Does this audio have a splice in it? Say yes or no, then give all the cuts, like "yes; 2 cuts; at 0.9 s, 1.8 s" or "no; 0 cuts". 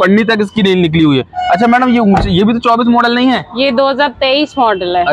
no; 0 cuts